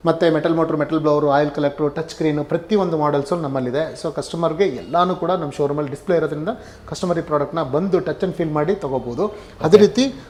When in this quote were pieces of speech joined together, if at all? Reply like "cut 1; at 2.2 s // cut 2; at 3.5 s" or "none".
none